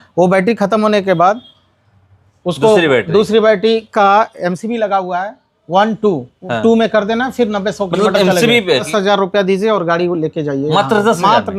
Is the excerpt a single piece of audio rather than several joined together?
no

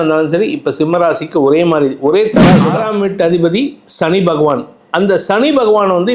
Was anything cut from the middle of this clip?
yes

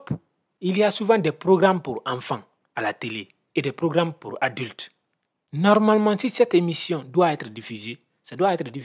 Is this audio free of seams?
yes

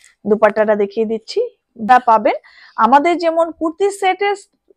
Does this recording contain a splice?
yes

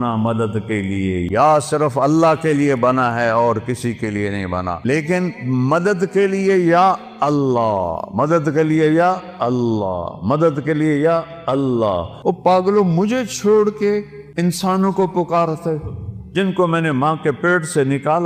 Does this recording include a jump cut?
yes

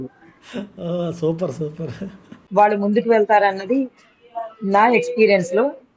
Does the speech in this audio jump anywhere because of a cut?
yes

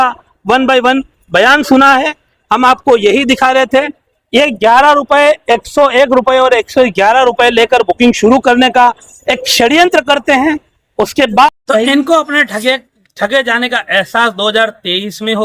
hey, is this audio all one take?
no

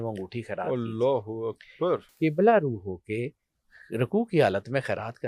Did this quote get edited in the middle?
no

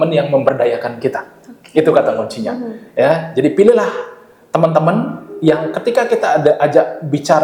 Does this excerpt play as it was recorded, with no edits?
yes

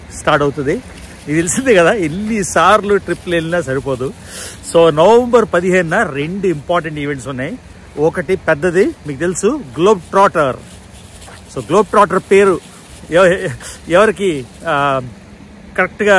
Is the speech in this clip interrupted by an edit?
no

